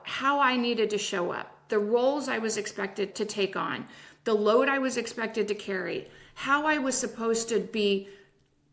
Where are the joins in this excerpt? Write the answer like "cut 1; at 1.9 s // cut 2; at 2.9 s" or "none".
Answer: cut 1; at 3.1 s